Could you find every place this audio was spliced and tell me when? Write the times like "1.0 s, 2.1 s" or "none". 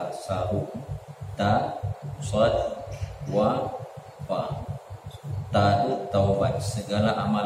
none